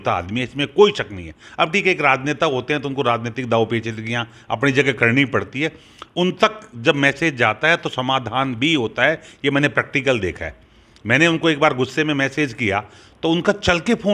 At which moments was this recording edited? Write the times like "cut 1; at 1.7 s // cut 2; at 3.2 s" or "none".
none